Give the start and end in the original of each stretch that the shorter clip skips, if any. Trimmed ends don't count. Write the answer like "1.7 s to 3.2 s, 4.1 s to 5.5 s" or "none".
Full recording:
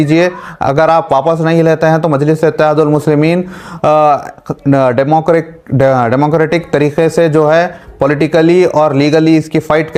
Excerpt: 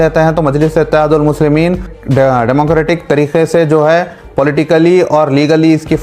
3.6 s to 5.6 s